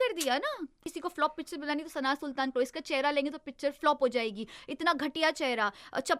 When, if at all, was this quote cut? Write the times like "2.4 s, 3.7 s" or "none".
1.0 s